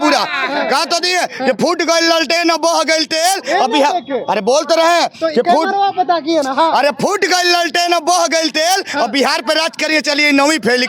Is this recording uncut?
yes; 0 cuts

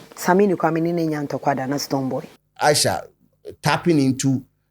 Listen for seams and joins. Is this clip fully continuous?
no; 1 cut; at 2.4 s

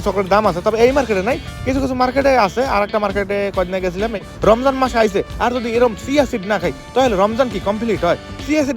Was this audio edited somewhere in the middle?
yes; 1 cut; at 4.3 s

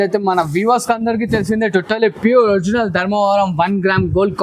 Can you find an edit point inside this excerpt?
no; 0 cuts

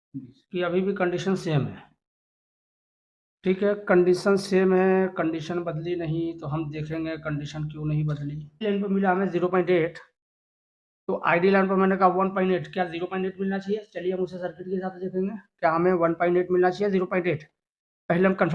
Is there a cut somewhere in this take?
yes; 1 cut; at 8.6 s

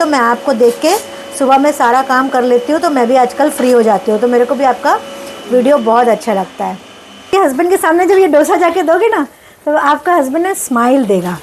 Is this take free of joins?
no; 1 cut; at 7.2 s

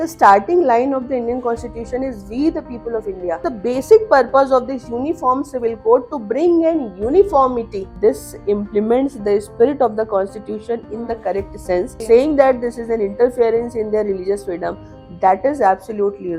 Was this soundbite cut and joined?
yes; 3 cuts; at 3.4 s, 7.8 s, 12.0 s

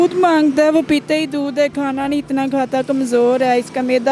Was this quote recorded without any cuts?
yes; 0 cuts

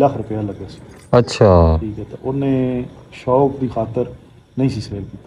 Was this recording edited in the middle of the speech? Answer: no; 0 cuts

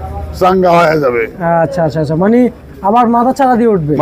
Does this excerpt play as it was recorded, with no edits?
yes; 0 cuts

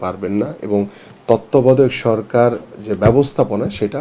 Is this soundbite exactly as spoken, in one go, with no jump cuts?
yes; 0 cuts

